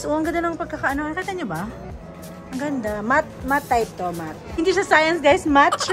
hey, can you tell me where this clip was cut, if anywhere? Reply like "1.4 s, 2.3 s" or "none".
4.5 s